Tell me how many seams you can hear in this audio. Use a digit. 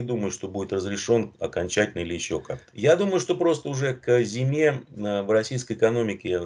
1